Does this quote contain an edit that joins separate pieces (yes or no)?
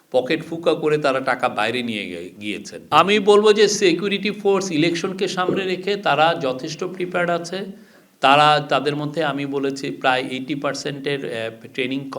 yes